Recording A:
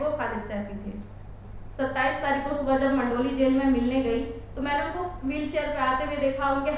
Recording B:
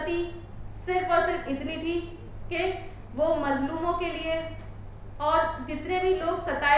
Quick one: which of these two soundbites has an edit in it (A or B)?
A